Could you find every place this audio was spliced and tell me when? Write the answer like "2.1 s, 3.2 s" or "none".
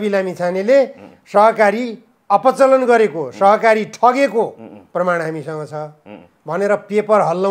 none